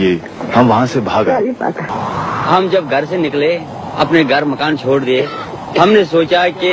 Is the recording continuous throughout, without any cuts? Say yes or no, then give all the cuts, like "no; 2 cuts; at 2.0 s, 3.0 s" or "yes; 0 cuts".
no; 1 cut; at 1.9 s